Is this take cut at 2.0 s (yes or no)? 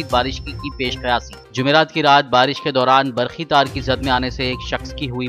no